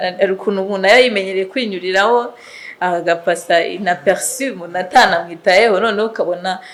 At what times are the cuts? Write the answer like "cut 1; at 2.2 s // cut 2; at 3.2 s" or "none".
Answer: none